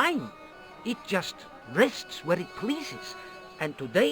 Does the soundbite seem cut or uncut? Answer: uncut